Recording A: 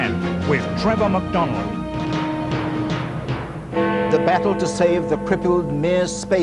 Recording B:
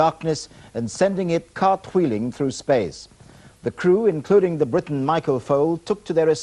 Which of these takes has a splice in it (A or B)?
B